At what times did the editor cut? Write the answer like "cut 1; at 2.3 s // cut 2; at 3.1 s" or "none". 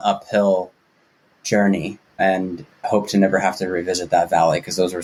none